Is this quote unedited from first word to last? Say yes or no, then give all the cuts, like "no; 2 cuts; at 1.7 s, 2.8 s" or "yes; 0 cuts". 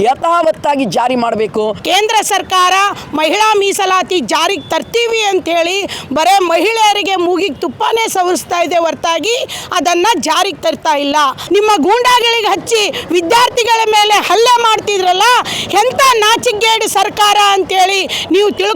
no; 2 cuts; at 1.8 s, 11.4 s